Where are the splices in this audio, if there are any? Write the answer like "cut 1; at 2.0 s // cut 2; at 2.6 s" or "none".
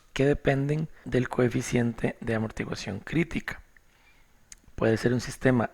cut 1; at 1.0 s

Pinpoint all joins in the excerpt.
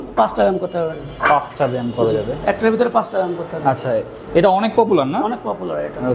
none

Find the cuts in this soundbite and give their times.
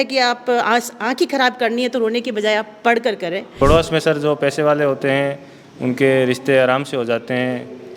cut 1; at 3.6 s

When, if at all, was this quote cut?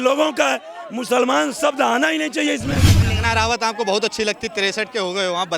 cut 1; at 3.1 s

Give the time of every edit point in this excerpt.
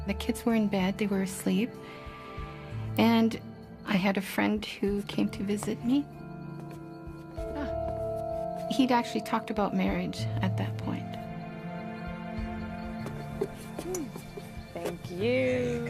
cut 1; at 6.9 s

